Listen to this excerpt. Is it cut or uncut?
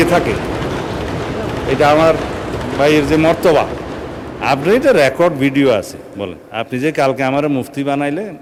uncut